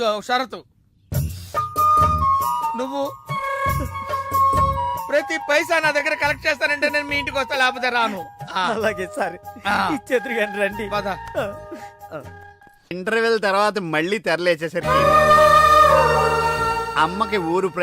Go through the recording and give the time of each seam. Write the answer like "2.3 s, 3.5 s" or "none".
12.9 s